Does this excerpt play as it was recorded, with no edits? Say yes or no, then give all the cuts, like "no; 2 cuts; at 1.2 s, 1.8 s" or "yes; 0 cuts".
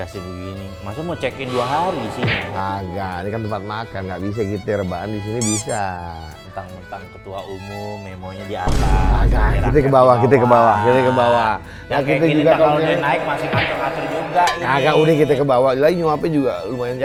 yes; 0 cuts